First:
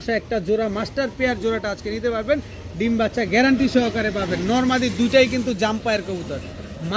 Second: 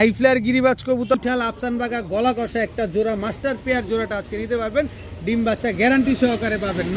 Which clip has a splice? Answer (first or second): second